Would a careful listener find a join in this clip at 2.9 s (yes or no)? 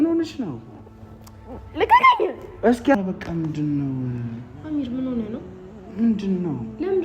yes